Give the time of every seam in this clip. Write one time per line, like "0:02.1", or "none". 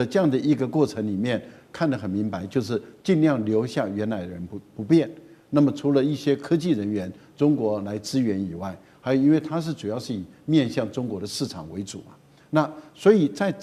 none